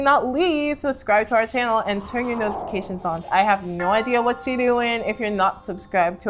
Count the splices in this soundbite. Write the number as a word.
one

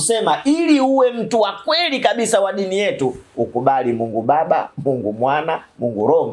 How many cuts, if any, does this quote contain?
zero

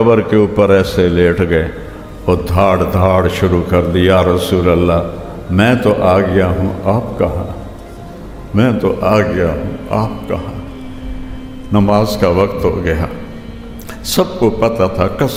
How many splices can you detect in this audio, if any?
zero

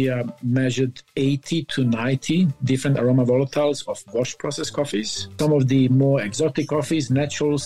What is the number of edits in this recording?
one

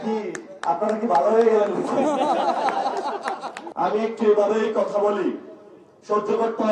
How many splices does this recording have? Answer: one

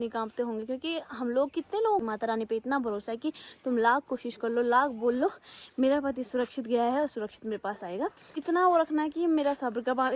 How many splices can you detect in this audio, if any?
two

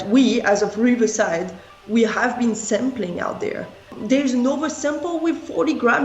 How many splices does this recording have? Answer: one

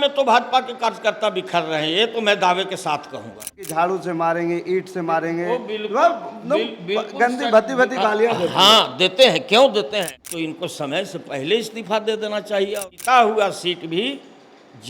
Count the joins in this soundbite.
three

